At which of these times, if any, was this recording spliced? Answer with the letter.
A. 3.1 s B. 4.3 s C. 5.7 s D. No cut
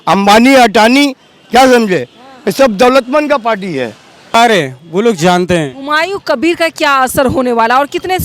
B